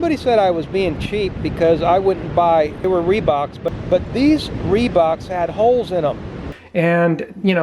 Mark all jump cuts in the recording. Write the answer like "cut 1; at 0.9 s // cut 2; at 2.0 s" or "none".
cut 1; at 6.4 s